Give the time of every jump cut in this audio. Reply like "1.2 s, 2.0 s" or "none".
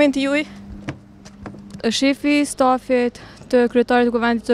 1.8 s